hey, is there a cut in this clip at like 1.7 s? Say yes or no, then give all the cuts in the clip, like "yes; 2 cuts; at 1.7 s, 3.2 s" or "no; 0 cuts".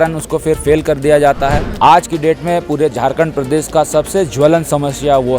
yes; 1 cut; at 1.7 s